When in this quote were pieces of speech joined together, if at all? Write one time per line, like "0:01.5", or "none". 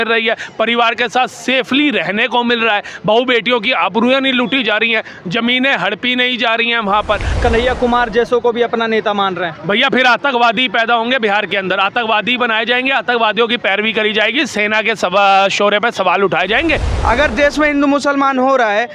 0:07.3
0:16.9